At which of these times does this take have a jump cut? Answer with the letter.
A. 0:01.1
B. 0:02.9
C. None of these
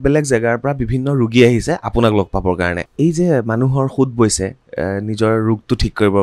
B